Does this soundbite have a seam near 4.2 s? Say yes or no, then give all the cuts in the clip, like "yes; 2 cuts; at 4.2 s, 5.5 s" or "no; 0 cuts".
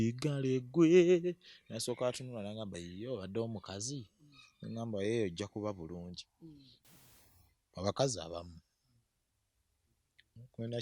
no; 1 cut; at 6.9 s